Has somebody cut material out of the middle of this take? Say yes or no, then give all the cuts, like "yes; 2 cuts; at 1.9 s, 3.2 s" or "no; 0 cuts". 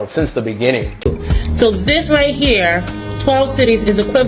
yes; 1 cut; at 1.1 s